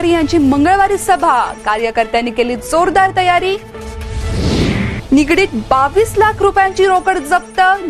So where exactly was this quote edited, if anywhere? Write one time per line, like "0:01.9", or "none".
none